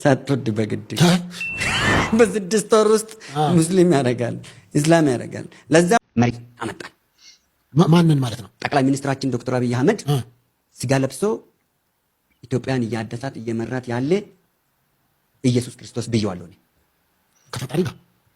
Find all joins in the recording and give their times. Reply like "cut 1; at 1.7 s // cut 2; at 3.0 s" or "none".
cut 1; at 6.0 s

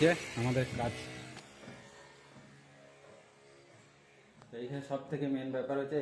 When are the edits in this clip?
cut 1; at 1.3 s

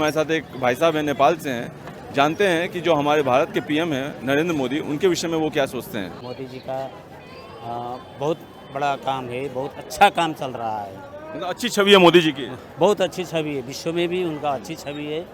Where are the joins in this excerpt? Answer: cut 1; at 6.2 s

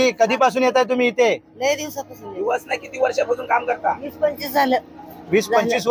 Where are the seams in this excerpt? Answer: none

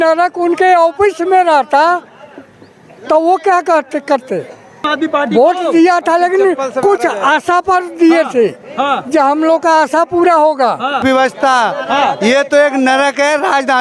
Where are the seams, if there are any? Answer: cut 1; at 4.8 s // cut 2; at 11.0 s

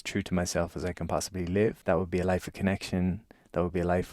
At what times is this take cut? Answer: cut 1; at 1.8 s

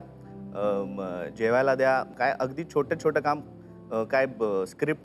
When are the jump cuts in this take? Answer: cut 1; at 2.1 s

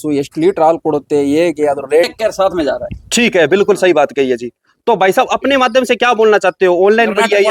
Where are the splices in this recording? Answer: cut 1; at 2.1 s

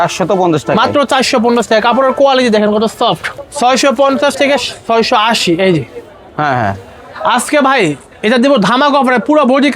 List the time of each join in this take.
cut 1; at 3.3 s

